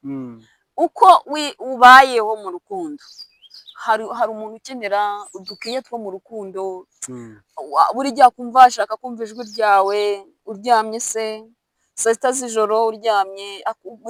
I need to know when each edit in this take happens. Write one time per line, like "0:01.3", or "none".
none

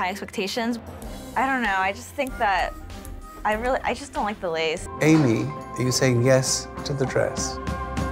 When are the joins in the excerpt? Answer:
0:04.9

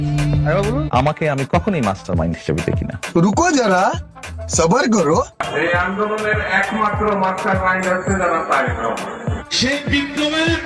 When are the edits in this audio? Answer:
0:09.2

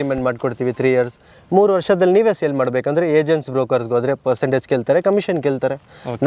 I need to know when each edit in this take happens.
none

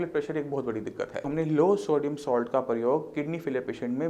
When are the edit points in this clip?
0:01.2

